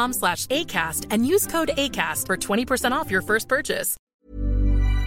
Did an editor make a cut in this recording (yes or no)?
yes